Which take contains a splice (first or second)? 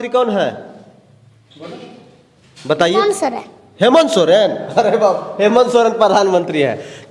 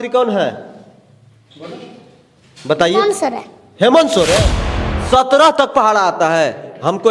second